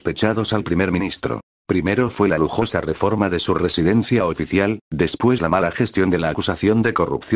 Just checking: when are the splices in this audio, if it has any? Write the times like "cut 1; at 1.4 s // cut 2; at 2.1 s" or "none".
cut 1; at 2.0 s